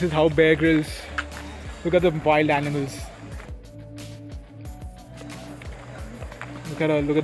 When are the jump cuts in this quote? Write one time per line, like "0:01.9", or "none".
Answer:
none